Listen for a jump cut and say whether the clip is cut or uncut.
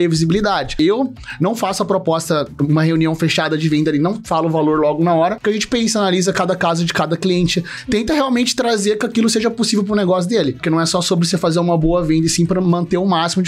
cut